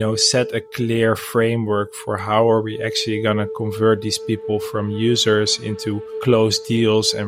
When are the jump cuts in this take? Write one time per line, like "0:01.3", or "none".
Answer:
none